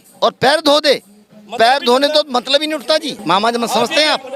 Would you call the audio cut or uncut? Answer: cut